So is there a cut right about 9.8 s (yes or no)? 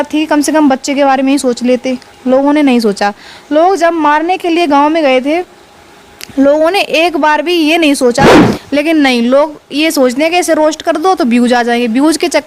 no